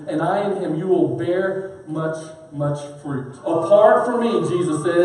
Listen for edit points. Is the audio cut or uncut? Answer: cut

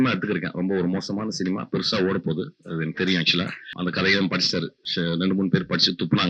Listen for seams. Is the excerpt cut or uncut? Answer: cut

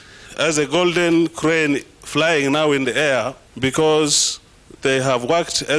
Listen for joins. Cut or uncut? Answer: cut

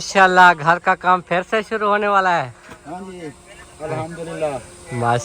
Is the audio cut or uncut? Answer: uncut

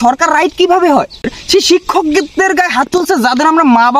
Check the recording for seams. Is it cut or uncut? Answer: cut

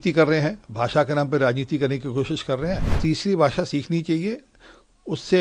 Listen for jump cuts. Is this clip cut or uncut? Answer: cut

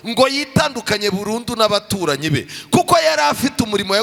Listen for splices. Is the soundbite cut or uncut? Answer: uncut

